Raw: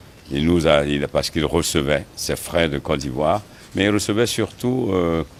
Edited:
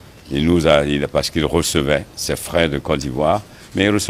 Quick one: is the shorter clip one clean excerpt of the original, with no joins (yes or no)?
yes